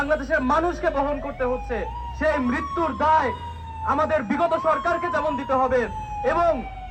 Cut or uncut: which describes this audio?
uncut